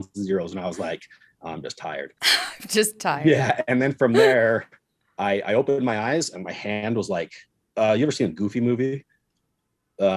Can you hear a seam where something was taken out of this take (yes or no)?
yes